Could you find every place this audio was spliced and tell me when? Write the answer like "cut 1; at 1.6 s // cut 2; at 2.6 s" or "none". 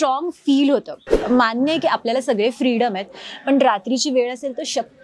cut 1; at 1.0 s